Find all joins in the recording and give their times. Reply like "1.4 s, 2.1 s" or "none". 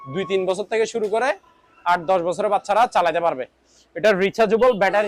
none